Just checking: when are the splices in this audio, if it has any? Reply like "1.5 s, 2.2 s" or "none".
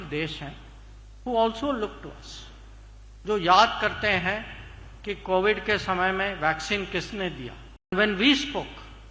7.9 s